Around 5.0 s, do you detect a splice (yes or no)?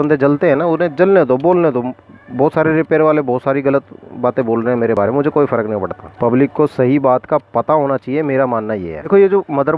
no